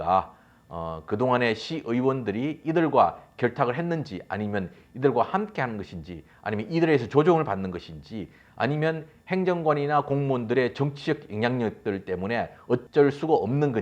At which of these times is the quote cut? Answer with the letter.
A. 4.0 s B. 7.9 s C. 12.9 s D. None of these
C